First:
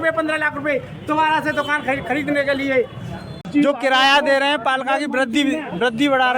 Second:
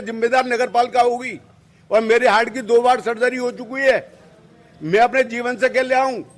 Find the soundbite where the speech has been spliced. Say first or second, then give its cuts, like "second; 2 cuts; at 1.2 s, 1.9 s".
first; 1 cut; at 3.4 s